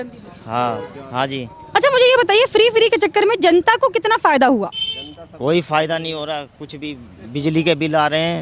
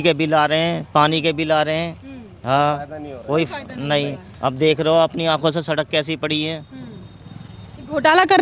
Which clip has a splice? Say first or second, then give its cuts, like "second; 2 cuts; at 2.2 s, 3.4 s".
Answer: first; 1 cut; at 1.6 s